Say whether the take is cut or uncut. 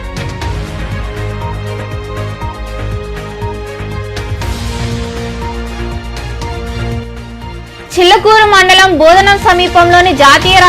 cut